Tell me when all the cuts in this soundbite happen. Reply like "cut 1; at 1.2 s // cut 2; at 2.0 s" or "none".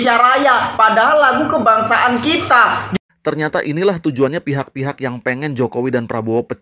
cut 1; at 2.8 s